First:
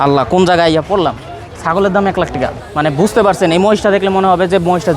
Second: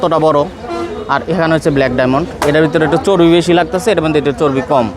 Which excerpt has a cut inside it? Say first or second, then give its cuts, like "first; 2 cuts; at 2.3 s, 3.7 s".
first; 1 cut; at 2.6 s